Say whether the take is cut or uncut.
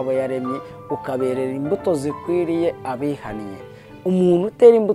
uncut